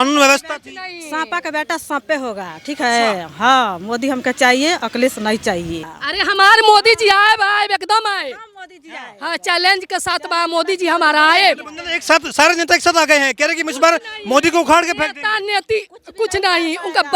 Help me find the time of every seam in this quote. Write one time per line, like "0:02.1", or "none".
0:06.0